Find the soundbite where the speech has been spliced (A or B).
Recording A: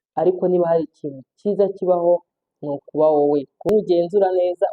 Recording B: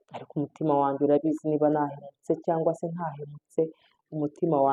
A